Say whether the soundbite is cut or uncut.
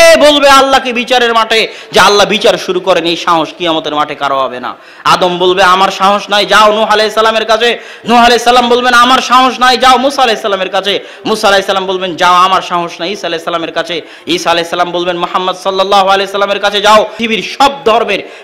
cut